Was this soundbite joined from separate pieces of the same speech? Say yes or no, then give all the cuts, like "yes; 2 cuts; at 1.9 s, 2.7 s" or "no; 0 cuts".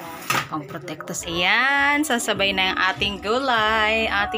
yes; 1 cut; at 1.2 s